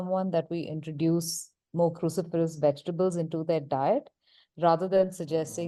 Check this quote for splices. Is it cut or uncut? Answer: uncut